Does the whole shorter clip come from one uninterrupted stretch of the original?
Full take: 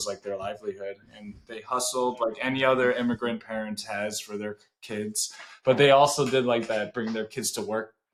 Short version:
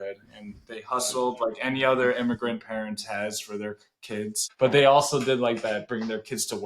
no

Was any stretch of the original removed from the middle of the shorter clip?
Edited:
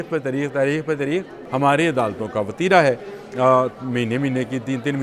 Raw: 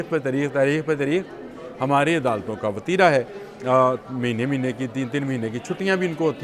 yes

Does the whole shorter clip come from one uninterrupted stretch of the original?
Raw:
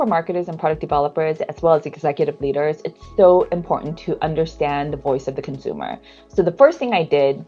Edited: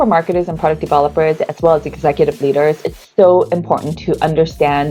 yes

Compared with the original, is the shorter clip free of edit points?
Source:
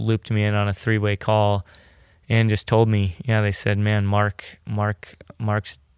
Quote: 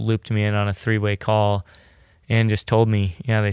yes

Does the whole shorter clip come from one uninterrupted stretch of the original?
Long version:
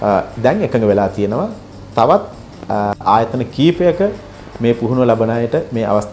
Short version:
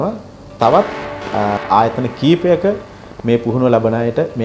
yes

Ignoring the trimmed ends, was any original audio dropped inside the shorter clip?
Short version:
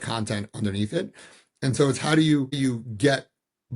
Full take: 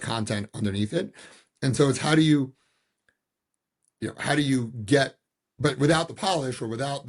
yes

